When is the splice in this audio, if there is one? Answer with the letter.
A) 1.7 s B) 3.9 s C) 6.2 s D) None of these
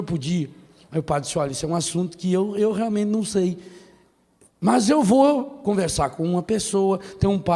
D